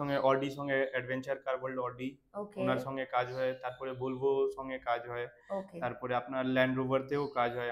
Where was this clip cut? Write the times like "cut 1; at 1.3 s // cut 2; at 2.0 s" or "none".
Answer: none